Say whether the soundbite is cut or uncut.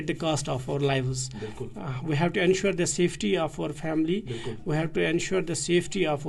uncut